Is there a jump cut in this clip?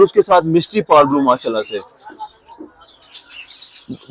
no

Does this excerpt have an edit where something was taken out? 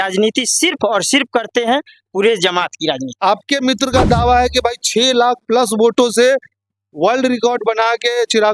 yes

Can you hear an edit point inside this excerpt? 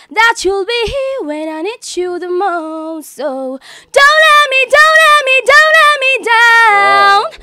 no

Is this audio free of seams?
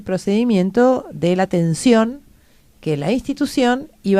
yes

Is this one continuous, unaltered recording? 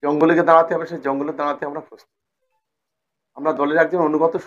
yes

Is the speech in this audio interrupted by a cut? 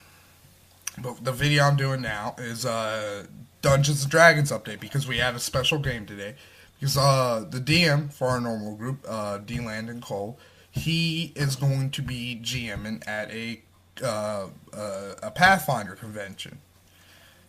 no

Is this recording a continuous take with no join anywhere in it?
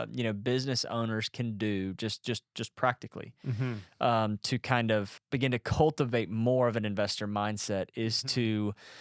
no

